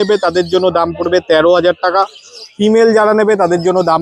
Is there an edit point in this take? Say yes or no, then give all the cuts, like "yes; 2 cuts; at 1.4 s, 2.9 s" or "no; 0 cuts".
no; 0 cuts